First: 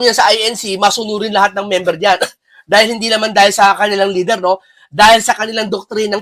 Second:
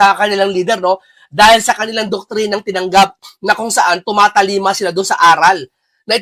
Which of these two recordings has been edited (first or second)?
first